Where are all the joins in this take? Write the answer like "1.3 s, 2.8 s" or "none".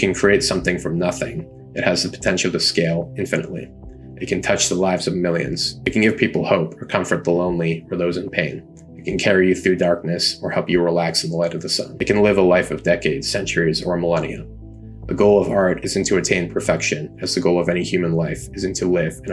none